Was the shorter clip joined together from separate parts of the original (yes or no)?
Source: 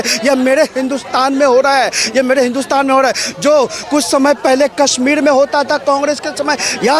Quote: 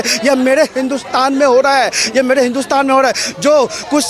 no